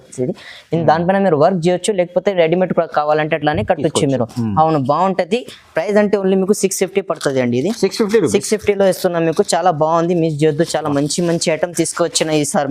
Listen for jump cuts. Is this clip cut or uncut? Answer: uncut